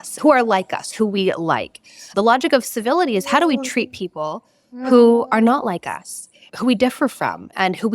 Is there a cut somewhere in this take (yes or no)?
yes